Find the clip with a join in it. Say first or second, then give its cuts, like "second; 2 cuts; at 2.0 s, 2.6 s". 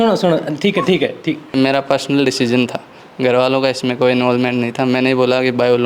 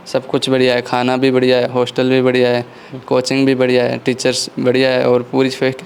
first; 1 cut; at 1.5 s